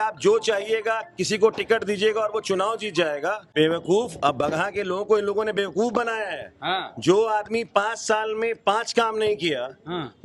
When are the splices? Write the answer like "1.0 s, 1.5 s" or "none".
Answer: 3.4 s